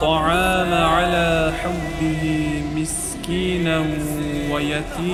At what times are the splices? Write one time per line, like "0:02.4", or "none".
none